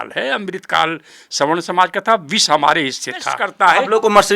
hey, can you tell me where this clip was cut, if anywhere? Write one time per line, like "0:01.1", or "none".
0:03.4